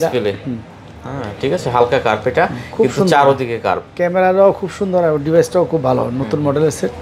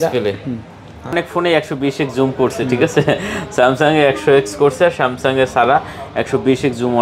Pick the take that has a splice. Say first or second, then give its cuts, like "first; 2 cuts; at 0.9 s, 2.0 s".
second; 1 cut; at 1.1 s